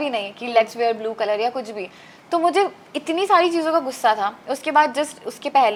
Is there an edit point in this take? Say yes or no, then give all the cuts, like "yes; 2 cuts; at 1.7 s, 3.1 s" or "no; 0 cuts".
no; 0 cuts